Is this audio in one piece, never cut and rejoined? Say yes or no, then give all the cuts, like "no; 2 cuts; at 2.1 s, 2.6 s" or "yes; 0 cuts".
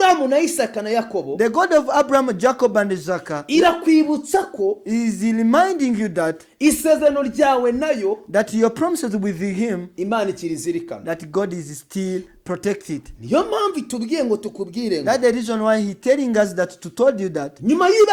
yes; 0 cuts